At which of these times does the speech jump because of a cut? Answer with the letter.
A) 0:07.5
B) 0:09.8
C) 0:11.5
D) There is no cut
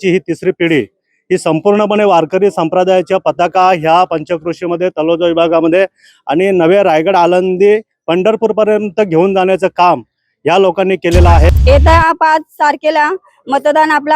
C